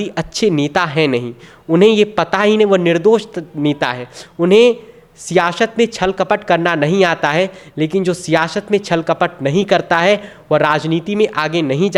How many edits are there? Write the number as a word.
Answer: zero